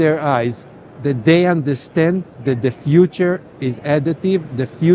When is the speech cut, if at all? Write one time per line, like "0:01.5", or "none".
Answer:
none